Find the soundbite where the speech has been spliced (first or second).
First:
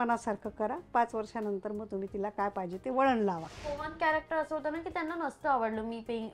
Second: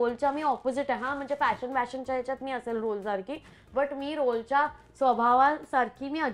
first